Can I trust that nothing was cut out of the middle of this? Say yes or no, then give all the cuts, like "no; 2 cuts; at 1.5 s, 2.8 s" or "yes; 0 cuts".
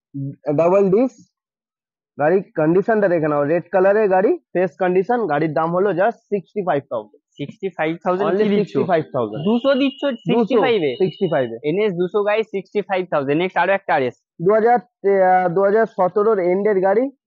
yes; 0 cuts